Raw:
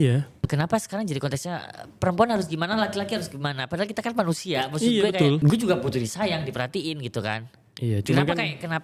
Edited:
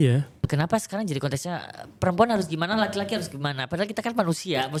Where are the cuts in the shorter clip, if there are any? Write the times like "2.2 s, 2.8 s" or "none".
none